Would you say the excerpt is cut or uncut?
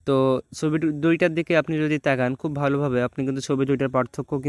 uncut